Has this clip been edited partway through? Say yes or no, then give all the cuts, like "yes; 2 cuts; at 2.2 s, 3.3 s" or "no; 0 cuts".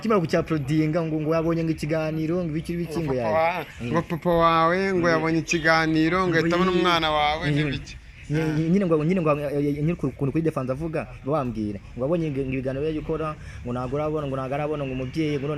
no; 0 cuts